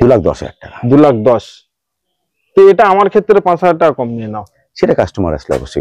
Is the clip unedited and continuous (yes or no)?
yes